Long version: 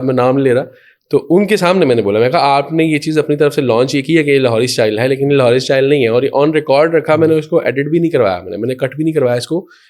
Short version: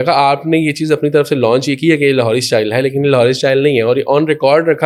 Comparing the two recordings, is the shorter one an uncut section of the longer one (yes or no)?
yes